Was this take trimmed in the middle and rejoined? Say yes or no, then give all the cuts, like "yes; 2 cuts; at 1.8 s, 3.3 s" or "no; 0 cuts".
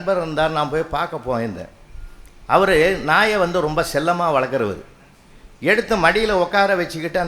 no; 0 cuts